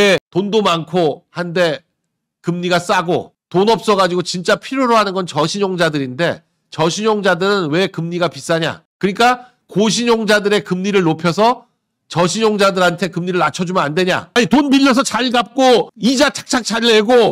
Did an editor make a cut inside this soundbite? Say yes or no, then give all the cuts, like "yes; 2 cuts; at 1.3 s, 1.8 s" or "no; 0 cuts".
yes; 2 cuts; at 3.4 s, 14.3 s